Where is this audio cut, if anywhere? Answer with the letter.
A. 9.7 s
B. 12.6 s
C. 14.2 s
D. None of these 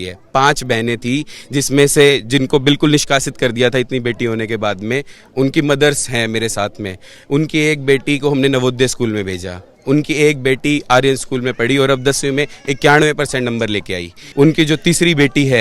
C